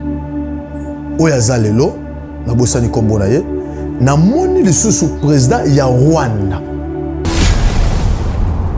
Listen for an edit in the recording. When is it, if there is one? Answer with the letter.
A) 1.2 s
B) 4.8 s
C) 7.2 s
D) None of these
C